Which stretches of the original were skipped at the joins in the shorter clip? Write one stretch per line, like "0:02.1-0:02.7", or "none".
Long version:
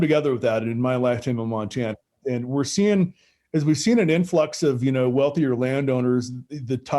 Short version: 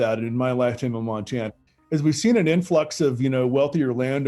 0:02.1-0:03.3